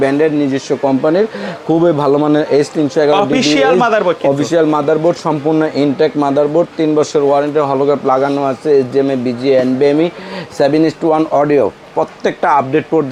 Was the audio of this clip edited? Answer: no; 0 cuts

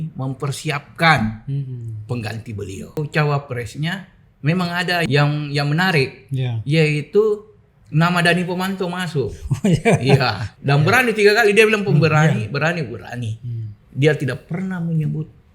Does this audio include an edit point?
yes; 3 cuts; at 3.0 s, 5.1 s, 10.5 s

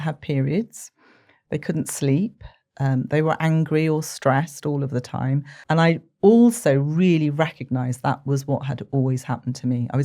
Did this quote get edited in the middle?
yes; 1 cut; at 5.5 s

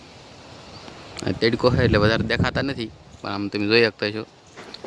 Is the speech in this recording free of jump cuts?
yes; 0 cuts

